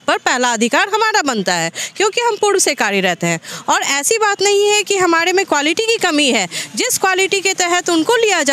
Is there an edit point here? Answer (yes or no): no